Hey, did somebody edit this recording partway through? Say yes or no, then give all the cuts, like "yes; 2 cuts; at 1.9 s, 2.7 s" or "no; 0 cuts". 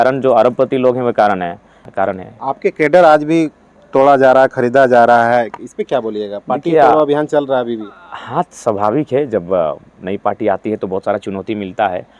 yes; 1 cut; at 1.8 s